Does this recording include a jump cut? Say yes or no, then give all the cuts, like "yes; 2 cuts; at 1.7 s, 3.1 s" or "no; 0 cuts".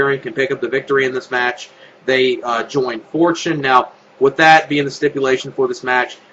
yes; 1 cut; at 1.3 s